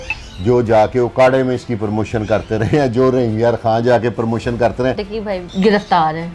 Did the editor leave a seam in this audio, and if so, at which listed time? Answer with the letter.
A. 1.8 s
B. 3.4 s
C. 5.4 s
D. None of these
C